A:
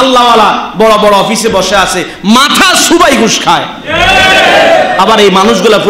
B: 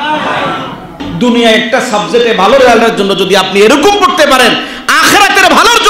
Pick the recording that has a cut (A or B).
B